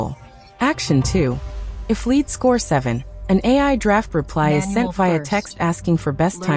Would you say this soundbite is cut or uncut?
uncut